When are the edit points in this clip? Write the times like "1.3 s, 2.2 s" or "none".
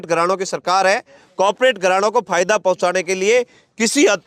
none